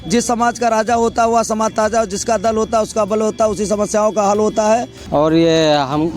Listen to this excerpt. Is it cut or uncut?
cut